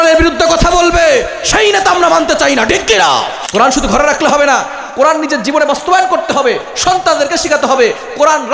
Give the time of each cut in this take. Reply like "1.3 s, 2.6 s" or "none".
3.4 s